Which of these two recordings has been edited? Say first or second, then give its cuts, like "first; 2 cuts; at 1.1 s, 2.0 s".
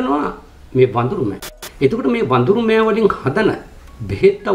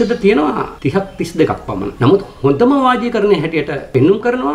first; 1 cut; at 1.5 s